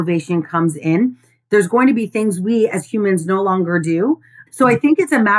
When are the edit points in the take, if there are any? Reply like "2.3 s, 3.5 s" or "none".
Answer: 4.4 s